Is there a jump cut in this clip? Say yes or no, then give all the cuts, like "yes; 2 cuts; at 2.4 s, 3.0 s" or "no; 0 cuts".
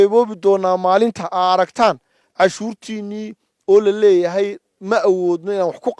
no; 0 cuts